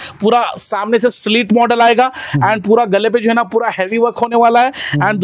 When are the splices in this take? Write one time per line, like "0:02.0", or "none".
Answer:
none